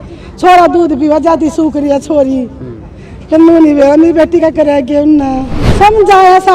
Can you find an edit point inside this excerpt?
yes; 1 cut; at 5.6 s

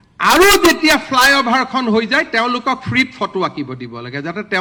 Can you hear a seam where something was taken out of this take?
no; 0 cuts

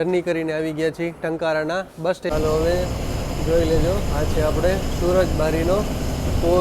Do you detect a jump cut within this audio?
yes; 1 cut; at 2.3 s

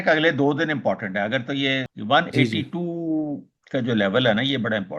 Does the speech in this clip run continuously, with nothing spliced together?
no; 1 cut; at 1.9 s

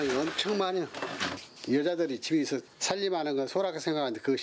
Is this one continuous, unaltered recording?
no; 1 cut; at 2.7 s

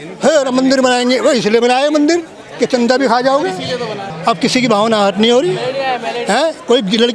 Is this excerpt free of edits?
no; 1 cut; at 4.1 s

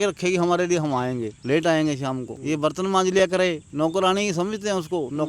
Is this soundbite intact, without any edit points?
no; 3 cuts; at 1.3 s, 2.3 s, 3.6 s

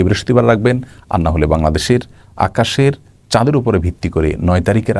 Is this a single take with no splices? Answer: yes; 0 cuts

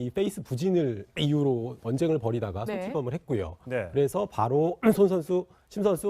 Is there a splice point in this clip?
yes; 1 cut; at 3.0 s

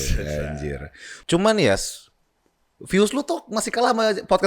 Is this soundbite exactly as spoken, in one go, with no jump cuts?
no; 1 cut; at 1.2 s

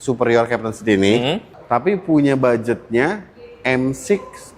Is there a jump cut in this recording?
yes; 1 cut; at 1.5 s

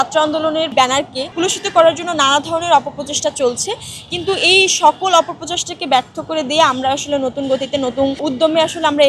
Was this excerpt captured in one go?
no; 2 cuts; at 0.8 s, 8.2 s

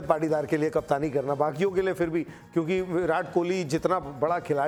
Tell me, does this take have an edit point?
no; 0 cuts

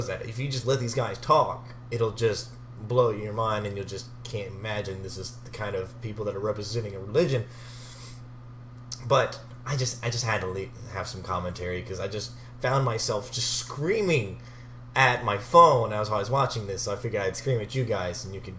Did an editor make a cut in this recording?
yes; 1 cut; at 4.4 s

